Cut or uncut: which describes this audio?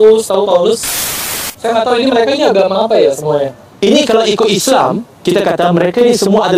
uncut